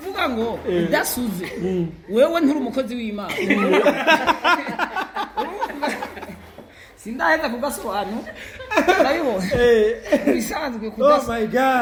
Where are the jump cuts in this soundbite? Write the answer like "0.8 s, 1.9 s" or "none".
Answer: none